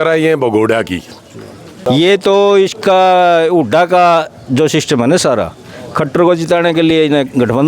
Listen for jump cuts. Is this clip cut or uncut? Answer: cut